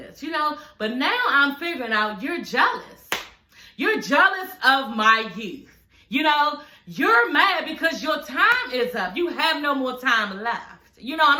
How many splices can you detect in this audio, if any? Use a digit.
0